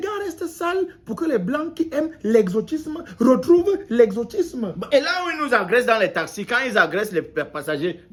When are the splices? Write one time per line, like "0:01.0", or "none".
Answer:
none